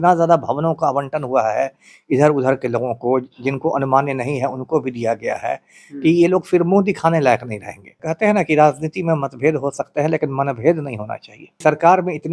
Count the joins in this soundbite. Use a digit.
2